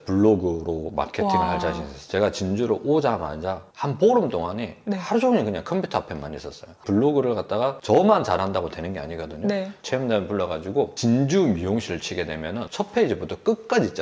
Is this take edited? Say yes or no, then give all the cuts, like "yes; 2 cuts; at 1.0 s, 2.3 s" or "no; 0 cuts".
no; 0 cuts